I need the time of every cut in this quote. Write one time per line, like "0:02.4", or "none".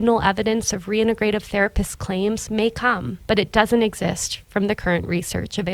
none